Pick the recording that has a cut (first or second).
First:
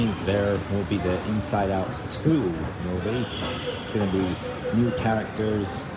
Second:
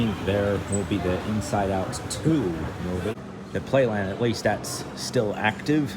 second